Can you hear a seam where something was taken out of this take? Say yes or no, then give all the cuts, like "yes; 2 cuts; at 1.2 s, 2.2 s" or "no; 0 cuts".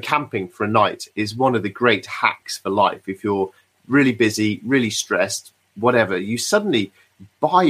no; 0 cuts